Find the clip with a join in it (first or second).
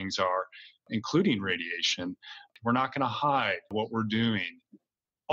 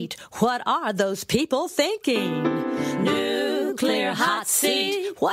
first